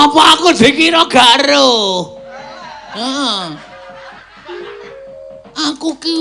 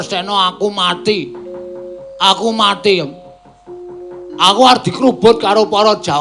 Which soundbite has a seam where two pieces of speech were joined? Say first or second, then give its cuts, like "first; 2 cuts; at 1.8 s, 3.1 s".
first; 1 cut; at 3.5 s